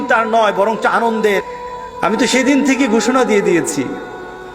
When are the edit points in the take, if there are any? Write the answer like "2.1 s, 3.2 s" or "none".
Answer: 1.4 s